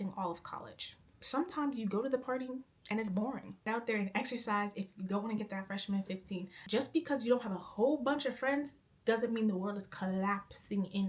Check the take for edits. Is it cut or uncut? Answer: cut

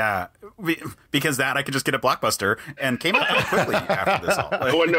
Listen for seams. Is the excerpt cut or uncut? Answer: cut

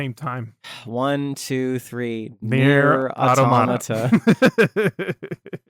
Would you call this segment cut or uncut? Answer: uncut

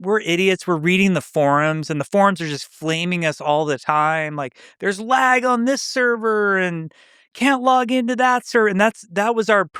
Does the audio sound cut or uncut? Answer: uncut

